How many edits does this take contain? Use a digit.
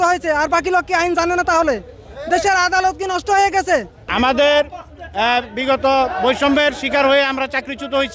0